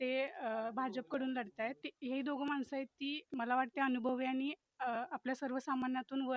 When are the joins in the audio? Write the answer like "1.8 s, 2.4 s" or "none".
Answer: 1.8 s